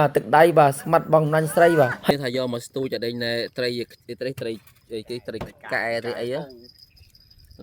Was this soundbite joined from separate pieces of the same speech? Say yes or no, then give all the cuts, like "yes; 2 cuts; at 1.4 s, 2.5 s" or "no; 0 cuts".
yes; 1 cut; at 2.1 s